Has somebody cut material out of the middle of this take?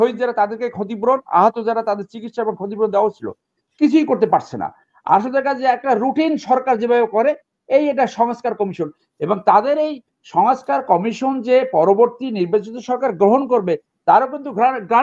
no; 0 cuts

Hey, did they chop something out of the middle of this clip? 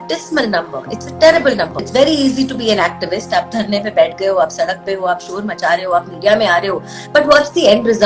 yes; 1 cut; at 1.8 s

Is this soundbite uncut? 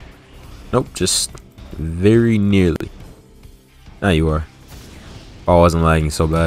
yes; 0 cuts

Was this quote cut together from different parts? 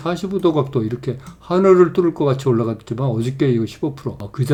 no; 0 cuts

